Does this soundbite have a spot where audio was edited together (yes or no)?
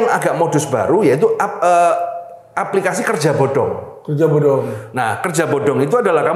no